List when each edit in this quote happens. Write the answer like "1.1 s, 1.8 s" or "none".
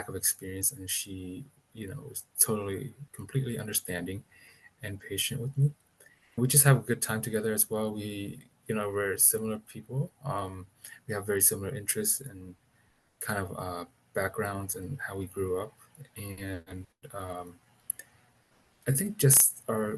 6.4 s